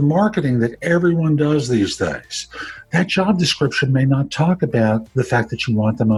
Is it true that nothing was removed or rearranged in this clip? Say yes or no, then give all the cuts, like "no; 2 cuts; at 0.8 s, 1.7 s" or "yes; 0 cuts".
yes; 0 cuts